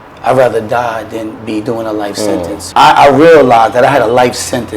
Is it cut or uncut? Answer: cut